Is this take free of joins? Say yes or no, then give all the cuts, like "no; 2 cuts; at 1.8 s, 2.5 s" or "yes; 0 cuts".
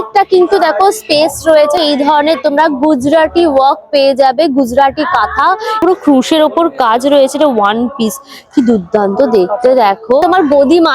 no; 3 cuts; at 1.8 s, 5.8 s, 10.2 s